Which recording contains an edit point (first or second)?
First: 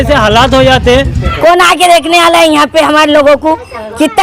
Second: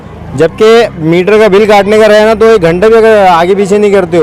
first